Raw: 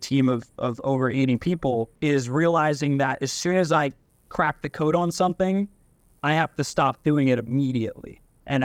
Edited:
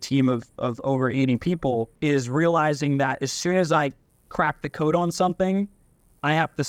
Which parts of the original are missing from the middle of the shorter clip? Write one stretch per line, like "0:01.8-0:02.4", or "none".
none